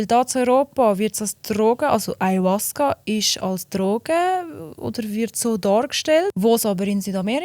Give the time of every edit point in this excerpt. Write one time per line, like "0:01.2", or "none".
0:06.3